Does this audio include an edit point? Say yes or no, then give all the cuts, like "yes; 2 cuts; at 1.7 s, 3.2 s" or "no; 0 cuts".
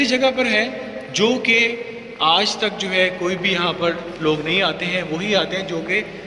no; 0 cuts